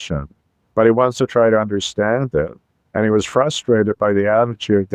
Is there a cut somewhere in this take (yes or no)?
no